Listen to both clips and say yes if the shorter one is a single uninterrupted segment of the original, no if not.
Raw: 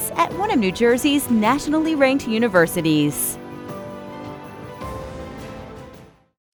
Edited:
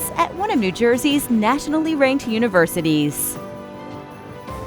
no